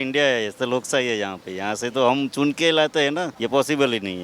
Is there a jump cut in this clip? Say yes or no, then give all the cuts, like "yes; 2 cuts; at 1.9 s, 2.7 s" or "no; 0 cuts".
yes; 1 cut; at 3.3 s